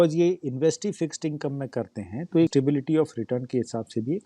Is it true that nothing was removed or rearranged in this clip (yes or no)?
no